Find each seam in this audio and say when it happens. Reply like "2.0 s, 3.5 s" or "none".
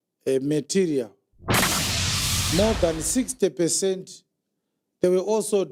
none